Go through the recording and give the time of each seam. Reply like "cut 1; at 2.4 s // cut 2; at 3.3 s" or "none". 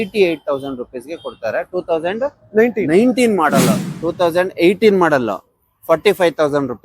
cut 1; at 3.8 s